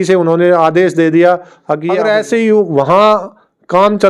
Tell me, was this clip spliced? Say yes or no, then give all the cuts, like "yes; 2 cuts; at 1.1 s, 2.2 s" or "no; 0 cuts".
yes; 1 cut; at 1.9 s